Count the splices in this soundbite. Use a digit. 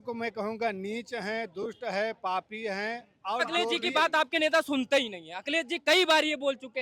1